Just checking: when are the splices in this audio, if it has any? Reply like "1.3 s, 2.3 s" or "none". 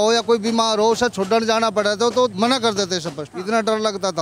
3.3 s

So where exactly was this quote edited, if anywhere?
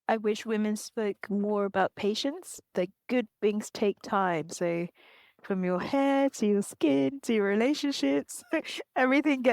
2.7 s

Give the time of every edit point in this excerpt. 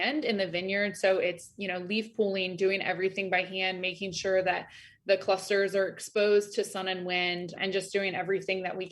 none

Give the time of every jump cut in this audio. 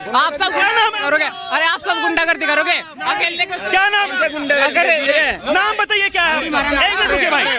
none

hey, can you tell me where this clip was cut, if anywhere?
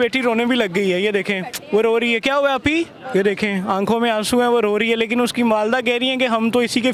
none

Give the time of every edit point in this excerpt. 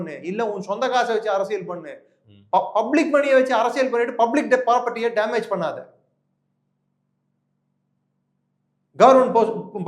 none

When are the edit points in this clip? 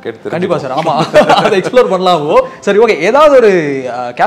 none

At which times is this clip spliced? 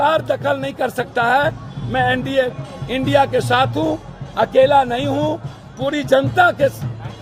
none

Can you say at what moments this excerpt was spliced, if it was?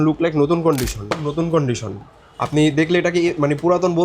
1.1 s

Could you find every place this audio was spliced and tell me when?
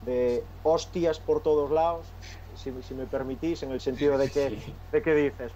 none

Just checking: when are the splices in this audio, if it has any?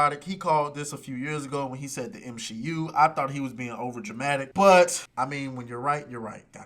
4.5 s, 5.0 s

